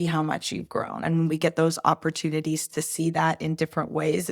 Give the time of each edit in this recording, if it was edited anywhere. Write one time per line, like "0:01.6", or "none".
0:01.0